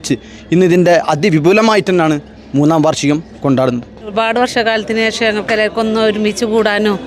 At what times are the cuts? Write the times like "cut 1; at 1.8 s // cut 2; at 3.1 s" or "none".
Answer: cut 1; at 4.1 s